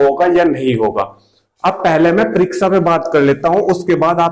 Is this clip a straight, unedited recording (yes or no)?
yes